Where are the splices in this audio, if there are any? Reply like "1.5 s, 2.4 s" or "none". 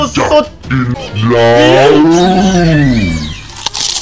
1.0 s